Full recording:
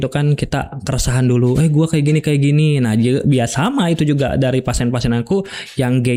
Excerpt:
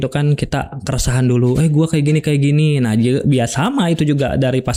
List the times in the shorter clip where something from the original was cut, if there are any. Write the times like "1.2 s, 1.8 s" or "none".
none